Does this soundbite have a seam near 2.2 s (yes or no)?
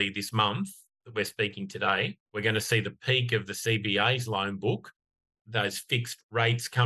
yes